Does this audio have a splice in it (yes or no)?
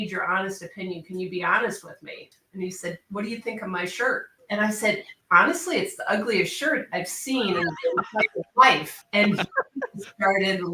yes